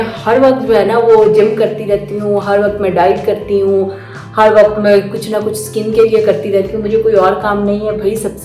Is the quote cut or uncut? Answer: uncut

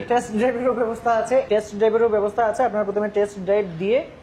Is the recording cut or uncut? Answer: cut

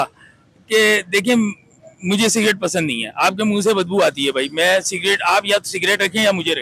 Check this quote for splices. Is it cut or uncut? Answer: uncut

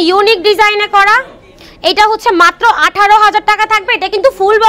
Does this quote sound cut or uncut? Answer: uncut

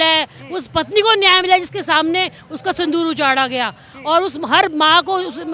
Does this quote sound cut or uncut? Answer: uncut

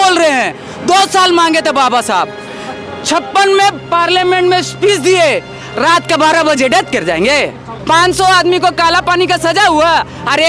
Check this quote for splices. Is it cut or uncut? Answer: cut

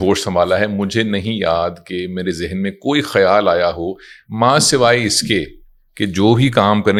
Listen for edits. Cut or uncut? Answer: uncut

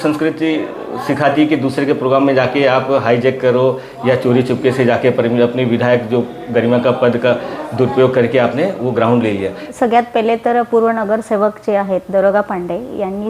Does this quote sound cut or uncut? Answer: cut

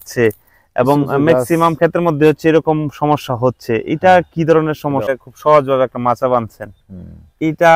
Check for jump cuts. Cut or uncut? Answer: cut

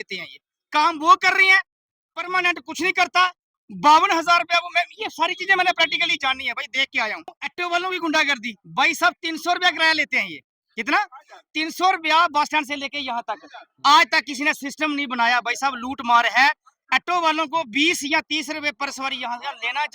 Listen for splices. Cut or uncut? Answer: cut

